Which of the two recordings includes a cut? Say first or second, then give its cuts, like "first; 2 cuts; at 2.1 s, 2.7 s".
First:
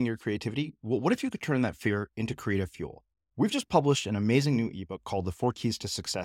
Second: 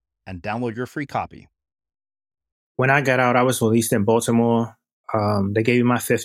second; 1 cut; at 2.7 s